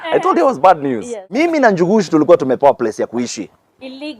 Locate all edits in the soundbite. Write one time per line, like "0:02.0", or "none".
0:01.2